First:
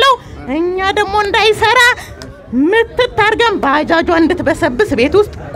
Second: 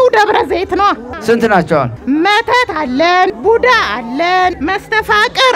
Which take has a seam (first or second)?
second